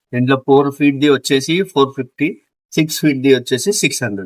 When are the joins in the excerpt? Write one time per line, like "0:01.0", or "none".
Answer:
none

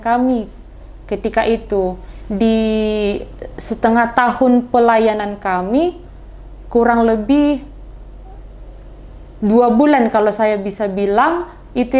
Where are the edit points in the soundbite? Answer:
none

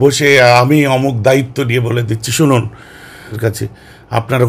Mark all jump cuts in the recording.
0:03.4

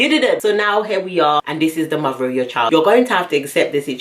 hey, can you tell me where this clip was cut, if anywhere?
0:02.7

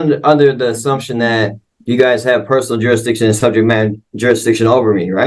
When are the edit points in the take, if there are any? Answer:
none

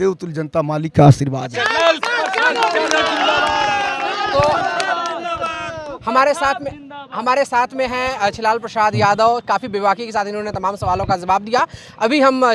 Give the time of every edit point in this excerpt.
none

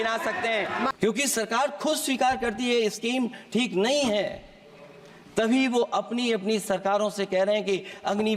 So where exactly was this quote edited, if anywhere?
0:00.9

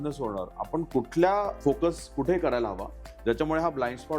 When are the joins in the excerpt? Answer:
0:01.5

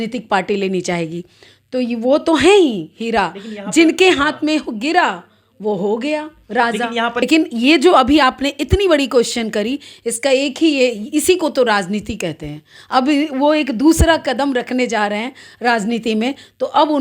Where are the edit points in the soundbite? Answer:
0:07.2

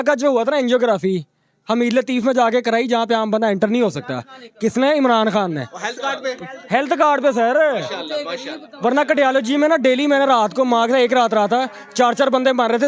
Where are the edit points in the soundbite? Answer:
none

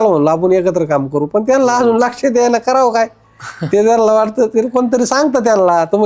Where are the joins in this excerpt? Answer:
none

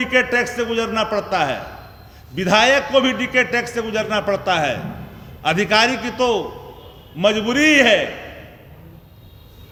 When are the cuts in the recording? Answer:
none

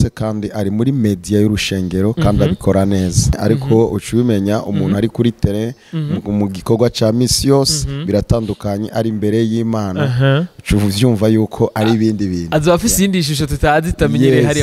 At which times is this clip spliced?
0:03.4

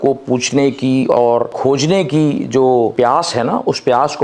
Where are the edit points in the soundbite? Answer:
0:01.5
0:02.9

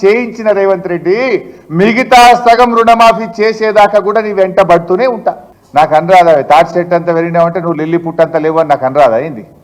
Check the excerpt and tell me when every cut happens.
0:05.5

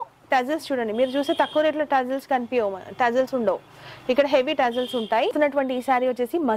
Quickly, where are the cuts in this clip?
0:05.3

